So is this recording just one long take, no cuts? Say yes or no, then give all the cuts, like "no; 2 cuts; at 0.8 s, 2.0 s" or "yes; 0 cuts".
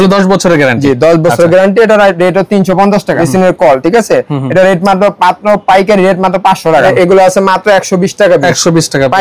no; 2 cuts; at 3.2 s, 6.9 s